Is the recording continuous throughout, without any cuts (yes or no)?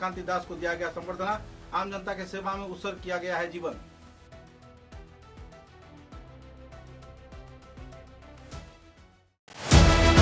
yes